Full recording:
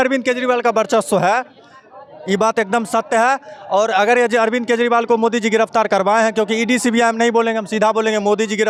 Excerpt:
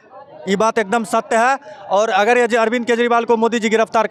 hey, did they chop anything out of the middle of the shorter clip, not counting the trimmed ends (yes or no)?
no